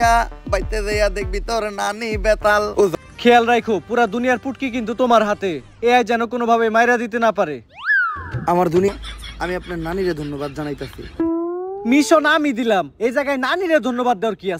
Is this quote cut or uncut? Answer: cut